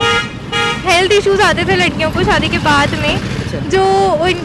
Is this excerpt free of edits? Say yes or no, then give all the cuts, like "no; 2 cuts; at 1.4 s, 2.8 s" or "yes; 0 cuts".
yes; 0 cuts